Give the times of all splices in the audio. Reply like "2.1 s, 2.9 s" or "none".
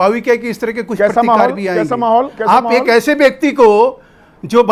none